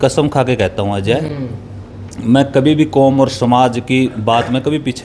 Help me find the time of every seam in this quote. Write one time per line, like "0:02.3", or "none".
none